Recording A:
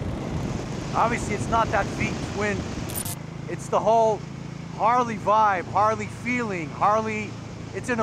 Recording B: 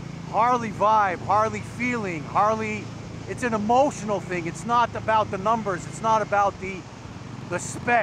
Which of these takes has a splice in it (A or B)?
A